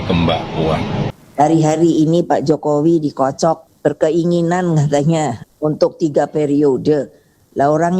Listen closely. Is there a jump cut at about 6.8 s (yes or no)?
no